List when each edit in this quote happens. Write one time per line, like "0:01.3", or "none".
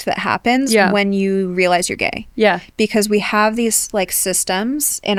none